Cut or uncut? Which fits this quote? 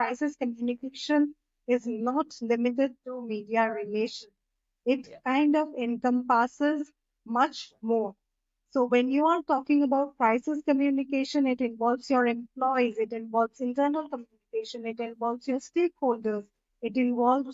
uncut